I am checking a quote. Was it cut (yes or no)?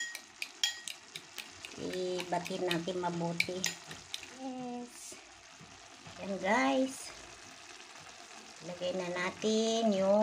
yes